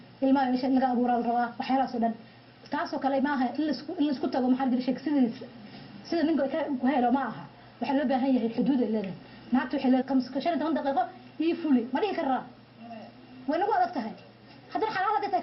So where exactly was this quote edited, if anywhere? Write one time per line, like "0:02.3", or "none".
none